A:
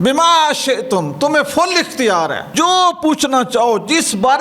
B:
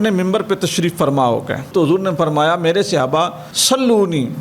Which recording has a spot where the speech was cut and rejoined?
B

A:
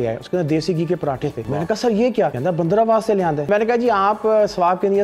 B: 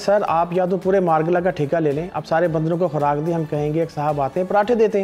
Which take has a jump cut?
A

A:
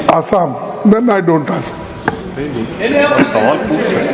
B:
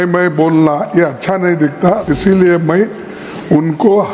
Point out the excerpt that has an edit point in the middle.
B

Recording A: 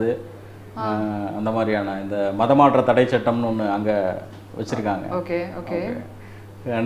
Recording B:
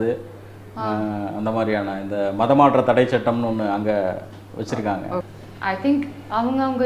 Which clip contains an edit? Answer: B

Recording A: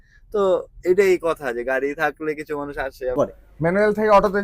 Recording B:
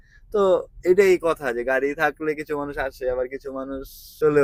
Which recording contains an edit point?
A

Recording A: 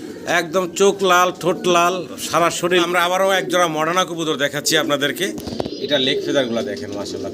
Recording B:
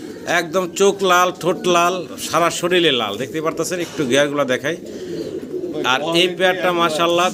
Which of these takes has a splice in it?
A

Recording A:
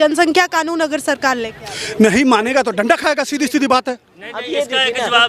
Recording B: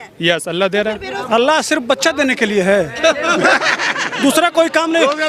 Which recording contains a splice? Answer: B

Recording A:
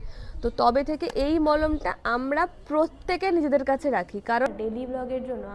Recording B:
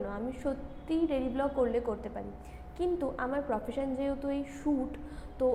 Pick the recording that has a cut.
A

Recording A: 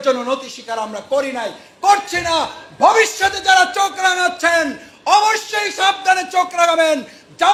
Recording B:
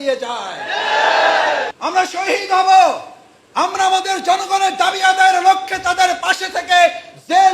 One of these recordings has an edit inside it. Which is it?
B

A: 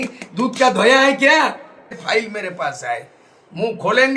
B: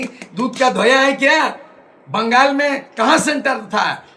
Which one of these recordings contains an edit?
A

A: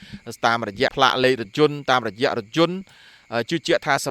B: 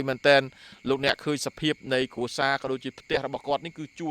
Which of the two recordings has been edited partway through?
A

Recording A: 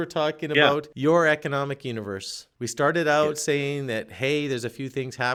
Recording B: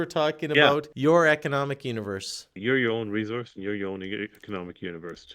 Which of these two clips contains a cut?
B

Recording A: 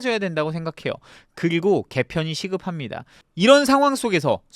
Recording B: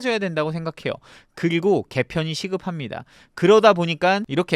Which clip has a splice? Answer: A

